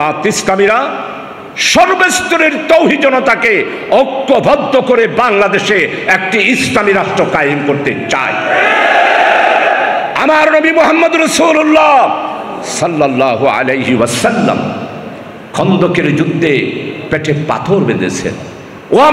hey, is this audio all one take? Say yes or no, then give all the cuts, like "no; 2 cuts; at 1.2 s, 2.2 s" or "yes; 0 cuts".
yes; 0 cuts